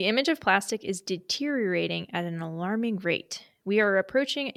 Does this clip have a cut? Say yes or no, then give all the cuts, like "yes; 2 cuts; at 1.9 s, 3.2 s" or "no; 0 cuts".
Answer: no; 0 cuts